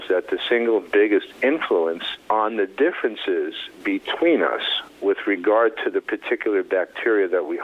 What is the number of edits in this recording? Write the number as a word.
one